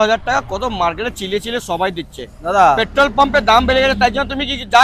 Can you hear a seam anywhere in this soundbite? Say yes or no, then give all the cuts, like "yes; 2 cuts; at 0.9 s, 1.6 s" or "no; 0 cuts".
no; 0 cuts